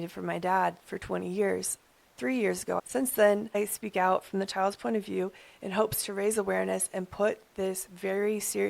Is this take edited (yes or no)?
yes